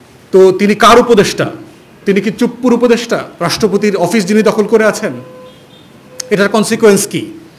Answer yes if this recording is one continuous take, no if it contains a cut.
yes